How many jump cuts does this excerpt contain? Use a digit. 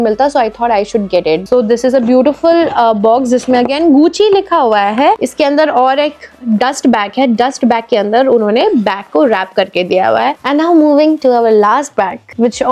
3